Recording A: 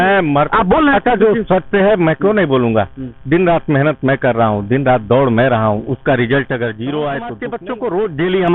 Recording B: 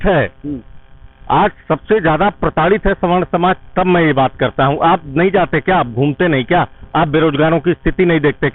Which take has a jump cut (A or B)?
A